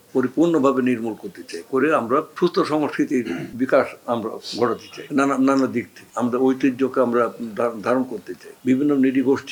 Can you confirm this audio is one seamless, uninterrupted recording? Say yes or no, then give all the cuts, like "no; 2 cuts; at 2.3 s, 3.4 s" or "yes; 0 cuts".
yes; 0 cuts